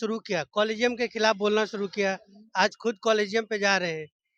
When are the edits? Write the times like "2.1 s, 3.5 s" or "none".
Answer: none